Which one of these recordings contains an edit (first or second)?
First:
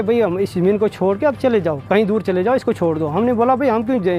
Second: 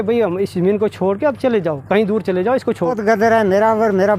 second